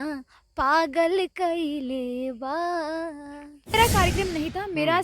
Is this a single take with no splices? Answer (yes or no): no